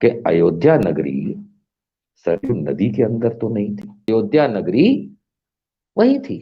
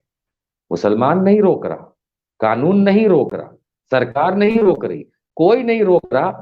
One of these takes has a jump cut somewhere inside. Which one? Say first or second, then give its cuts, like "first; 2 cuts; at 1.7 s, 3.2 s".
first; 1 cut; at 4.1 s